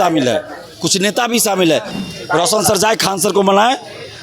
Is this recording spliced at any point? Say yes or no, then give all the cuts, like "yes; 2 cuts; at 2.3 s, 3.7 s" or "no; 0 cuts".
yes; 1 cut; at 1.9 s